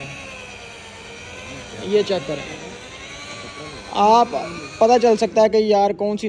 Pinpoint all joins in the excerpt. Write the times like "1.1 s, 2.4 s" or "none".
none